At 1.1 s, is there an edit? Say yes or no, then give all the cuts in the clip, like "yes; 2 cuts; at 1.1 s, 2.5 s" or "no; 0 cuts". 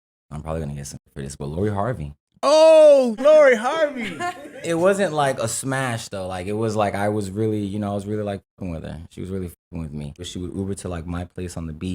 yes; 1 cut; at 1.1 s